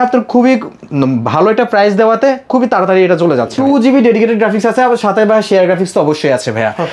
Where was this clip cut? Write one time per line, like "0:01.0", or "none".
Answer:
0:03.6